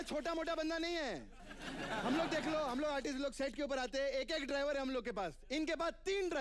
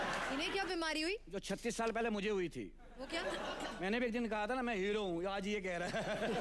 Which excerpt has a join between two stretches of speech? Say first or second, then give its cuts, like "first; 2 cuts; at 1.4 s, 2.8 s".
second; 1 cut; at 3.8 s